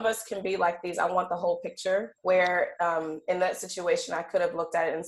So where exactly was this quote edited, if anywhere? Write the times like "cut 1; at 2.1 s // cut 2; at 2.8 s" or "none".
cut 1; at 2.1 s